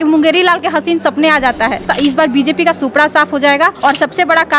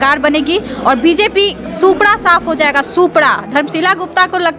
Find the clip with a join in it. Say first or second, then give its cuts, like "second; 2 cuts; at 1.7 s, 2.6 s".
first; 2 cuts; at 1.9 s, 3.7 s